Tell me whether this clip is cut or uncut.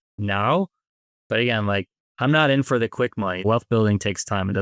cut